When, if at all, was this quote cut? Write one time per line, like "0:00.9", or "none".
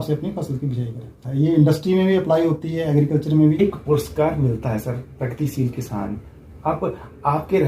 0:01.2
0:03.6